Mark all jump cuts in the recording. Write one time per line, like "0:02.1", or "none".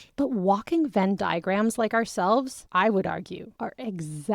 0:03.4